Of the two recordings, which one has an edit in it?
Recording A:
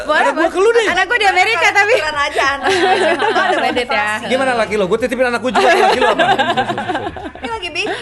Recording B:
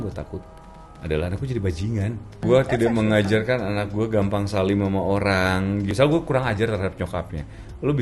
B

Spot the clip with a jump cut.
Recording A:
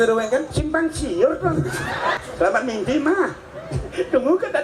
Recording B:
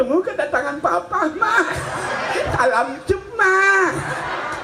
A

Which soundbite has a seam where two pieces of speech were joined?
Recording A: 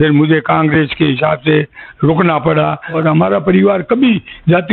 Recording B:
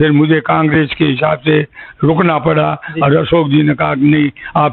A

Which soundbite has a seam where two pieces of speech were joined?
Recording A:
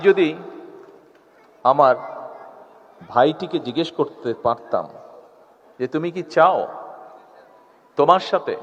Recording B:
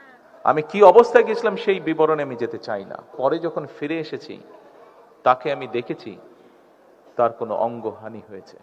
B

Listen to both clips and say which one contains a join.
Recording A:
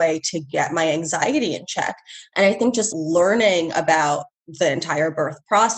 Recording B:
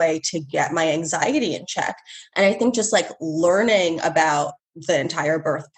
A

